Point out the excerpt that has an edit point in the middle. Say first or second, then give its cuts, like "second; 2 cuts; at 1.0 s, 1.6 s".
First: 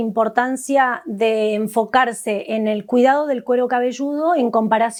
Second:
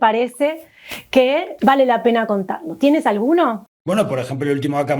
second; 1 cut; at 1.5 s